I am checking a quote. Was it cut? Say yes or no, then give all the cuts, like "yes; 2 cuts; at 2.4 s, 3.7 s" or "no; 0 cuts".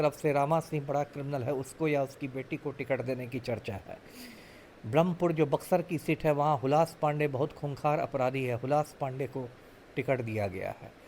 no; 0 cuts